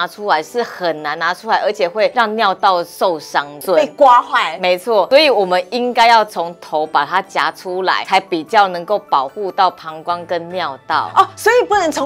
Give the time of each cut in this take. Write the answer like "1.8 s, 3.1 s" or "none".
2.1 s, 3.6 s, 5.1 s, 8.0 s